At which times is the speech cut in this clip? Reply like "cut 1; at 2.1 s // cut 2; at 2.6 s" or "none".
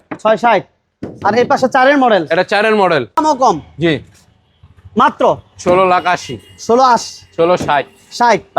cut 1; at 3.2 s